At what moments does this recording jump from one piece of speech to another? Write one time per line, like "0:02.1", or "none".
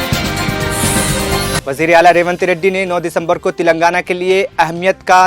0:01.6

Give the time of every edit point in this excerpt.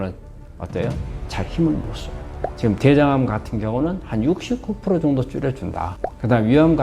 0:02.4

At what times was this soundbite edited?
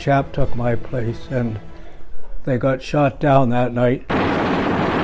0:04.0

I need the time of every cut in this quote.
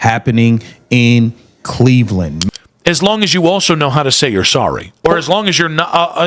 0:02.4

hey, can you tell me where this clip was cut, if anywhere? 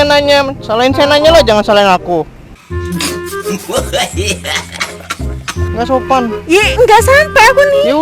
0:05.6

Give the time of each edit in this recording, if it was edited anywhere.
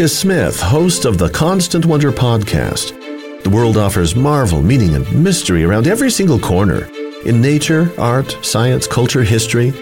none

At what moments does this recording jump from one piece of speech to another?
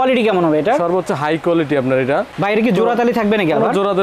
0:02.3

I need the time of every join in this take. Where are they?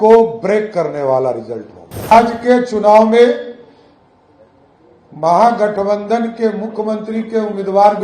0:02.1

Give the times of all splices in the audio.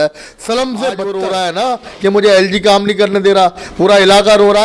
0:01.1

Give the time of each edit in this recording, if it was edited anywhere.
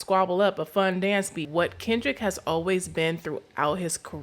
0:01.4

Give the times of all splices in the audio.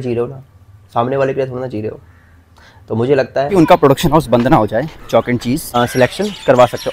0:03.5
0:05.7

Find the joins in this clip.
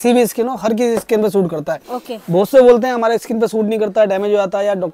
none

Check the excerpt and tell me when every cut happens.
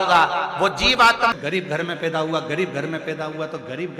0:01.3

